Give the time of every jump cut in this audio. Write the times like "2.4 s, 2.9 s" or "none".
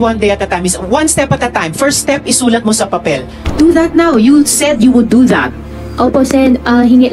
3.4 s